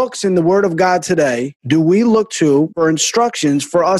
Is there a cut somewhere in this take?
yes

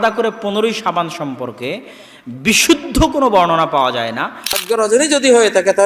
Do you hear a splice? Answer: yes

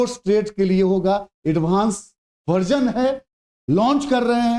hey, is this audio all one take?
yes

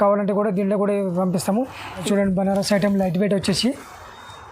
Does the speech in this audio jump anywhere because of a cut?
yes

